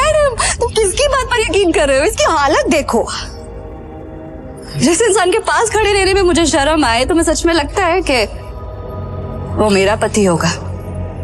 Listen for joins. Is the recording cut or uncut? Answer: uncut